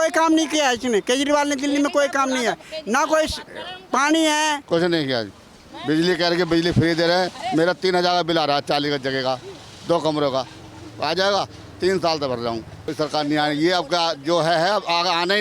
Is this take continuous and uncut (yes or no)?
no